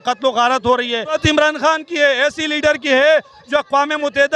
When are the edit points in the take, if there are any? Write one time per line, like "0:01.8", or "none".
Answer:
0:01.2